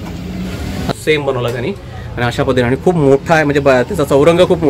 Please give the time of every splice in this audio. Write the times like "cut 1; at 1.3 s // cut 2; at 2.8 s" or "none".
cut 1; at 0.9 s